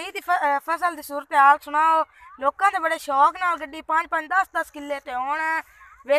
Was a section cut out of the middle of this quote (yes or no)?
no